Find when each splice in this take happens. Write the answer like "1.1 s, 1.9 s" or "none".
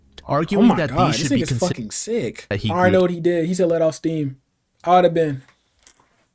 2.5 s